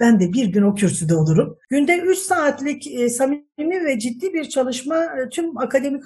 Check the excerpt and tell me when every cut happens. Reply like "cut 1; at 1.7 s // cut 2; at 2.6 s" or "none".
cut 1; at 1.6 s

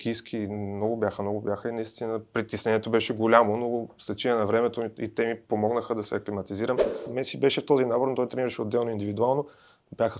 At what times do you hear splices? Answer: cut 1; at 7.1 s

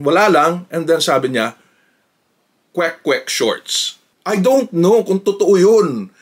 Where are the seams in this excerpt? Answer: cut 1; at 4.0 s

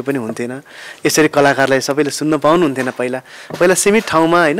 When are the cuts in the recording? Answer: none

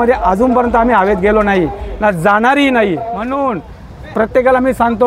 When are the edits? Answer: cut 1; at 3.2 s

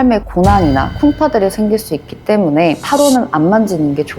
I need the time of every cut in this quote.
cut 1; at 0.9 s // cut 2; at 2.8 s

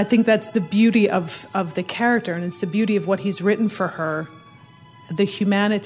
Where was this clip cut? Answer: none

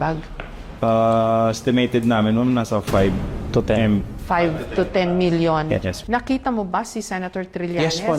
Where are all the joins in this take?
cut 1; at 6.0 s

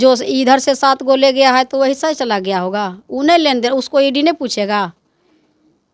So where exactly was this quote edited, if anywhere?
none

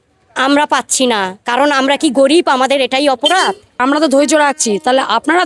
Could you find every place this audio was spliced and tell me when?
cut 1; at 3.8 s

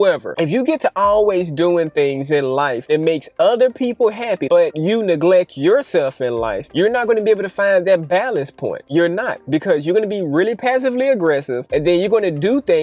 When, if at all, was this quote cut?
cut 1; at 4.6 s

